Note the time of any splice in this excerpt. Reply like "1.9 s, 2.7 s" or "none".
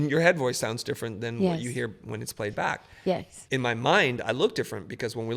3.3 s